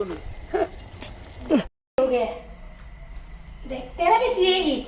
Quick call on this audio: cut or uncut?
cut